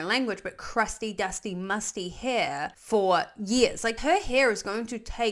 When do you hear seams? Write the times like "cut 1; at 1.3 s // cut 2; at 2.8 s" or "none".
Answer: cut 1; at 2.8 s // cut 2; at 4.0 s